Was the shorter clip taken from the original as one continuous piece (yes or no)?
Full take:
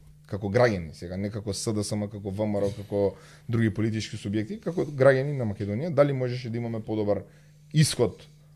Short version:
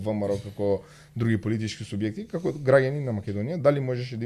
yes